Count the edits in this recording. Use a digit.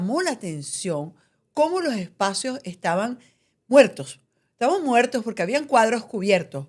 0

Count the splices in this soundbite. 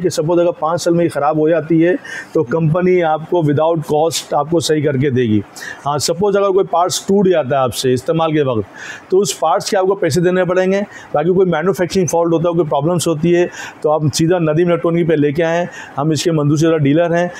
0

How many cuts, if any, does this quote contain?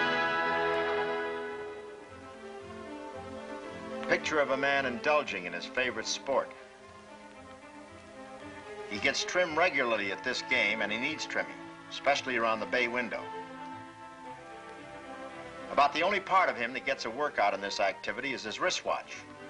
1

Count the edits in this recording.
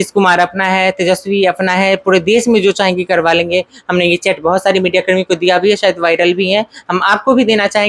0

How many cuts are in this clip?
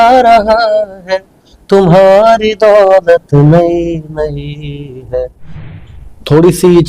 1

